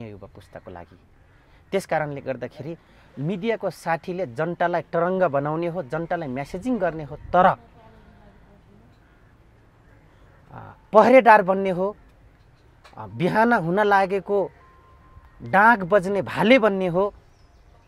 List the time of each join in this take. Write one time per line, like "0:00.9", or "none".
none